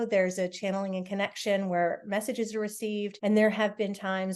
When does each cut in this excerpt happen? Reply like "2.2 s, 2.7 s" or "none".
3.1 s

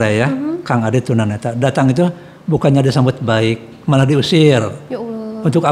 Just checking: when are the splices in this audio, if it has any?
none

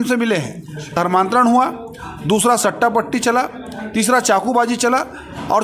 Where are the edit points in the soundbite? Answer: 0.9 s

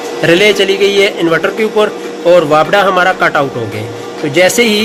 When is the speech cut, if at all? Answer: none

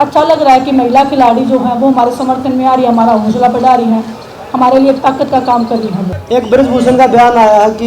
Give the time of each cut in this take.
6.1 s

